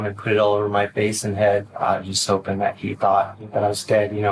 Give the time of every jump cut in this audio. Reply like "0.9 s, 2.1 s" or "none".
1.7 s, 3.4 s